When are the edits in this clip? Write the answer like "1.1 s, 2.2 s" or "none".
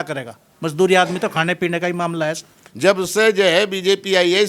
2.6 s